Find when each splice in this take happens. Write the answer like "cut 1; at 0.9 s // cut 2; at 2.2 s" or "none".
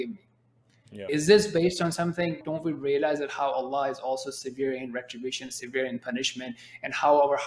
cut 1; at 1.1 s // cut 2; at 2.4 s

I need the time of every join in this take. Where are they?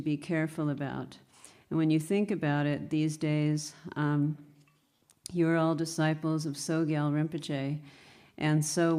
cut 1; at 6.8 s

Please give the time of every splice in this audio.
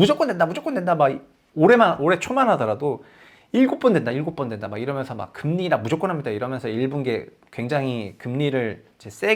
none

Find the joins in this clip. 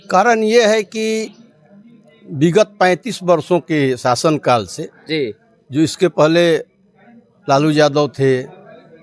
none

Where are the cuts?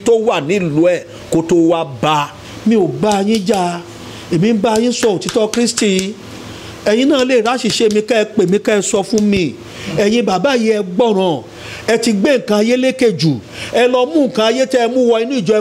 cut 1; at 2.4 s

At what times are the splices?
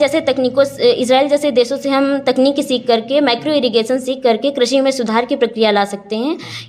none

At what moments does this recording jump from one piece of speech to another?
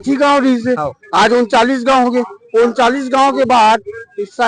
none

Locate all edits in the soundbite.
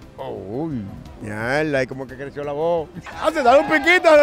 cut 1; at 1.1 s // cut 2; at 3.1 s

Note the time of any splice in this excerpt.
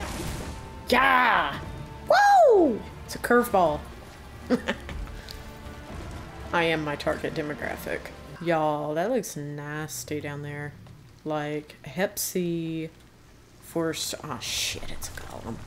cut 1; at 8.3 s

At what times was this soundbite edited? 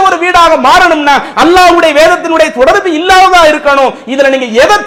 none

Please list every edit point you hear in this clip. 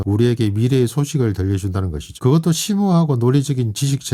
none

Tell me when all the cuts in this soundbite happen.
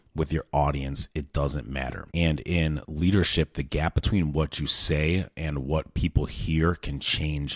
cut 1; at 2.0 s

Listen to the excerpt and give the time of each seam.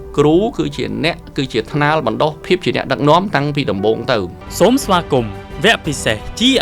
cut 1; at 2.4 s // cut 2; at 4.4 s

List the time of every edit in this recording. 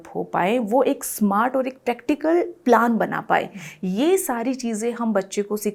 none

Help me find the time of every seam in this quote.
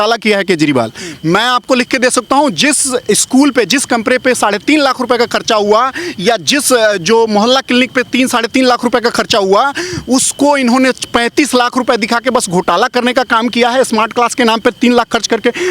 none

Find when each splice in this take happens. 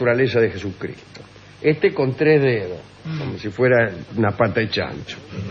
cut 1; at 1.0 s

